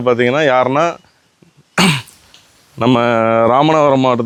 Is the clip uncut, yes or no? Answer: yes